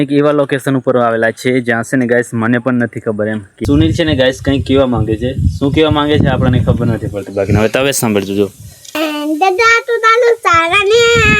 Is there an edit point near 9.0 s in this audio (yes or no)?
yes